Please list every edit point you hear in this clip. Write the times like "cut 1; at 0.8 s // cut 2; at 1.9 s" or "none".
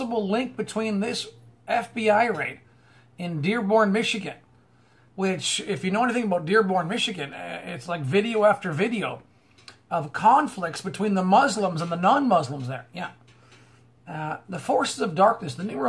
cut 1; at 10.8 s